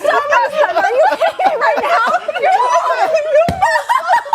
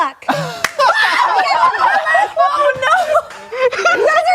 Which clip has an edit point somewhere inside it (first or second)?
first